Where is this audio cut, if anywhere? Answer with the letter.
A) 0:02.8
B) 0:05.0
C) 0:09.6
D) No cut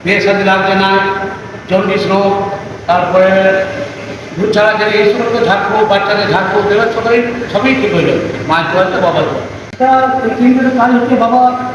C